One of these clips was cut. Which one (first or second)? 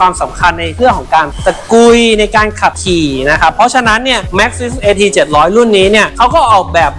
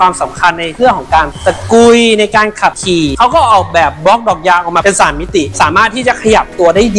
second